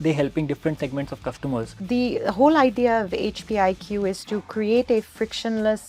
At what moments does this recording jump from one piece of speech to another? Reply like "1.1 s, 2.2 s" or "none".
1.8 s